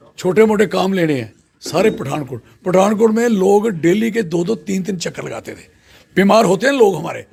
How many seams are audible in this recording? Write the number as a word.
zero